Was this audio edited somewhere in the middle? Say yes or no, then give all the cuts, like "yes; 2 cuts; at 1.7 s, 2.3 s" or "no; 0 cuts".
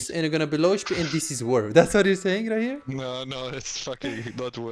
no; 0 cuts